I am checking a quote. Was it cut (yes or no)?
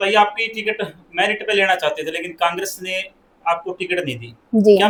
no